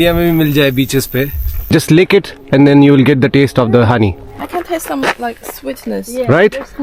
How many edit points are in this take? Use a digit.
2